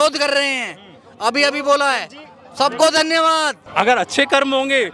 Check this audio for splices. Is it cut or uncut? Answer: cut